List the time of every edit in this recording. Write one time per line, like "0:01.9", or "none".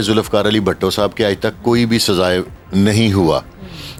none